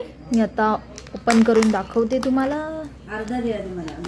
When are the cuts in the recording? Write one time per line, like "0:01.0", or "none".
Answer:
none